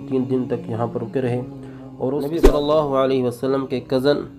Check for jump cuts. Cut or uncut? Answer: cut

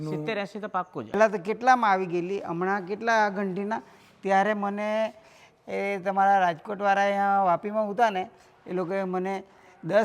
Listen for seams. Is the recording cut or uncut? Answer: cut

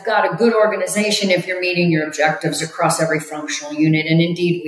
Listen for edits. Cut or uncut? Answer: uncut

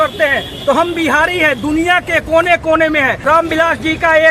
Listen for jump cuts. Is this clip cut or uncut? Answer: cut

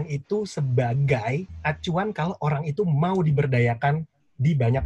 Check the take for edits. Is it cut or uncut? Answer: uncut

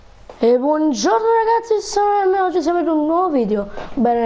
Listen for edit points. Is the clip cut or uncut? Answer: uncut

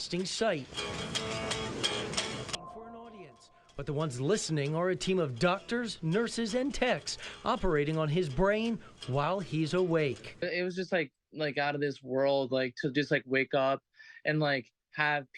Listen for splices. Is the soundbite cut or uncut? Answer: cut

